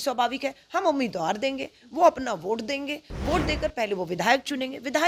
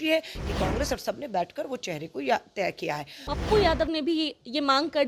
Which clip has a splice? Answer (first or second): second